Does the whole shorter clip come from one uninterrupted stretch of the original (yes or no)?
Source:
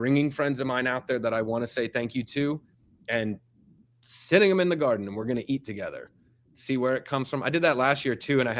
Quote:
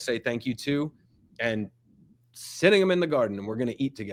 yes